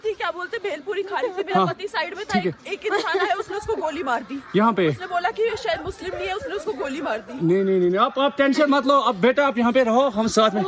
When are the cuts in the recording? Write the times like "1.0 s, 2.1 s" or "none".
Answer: 2.4 s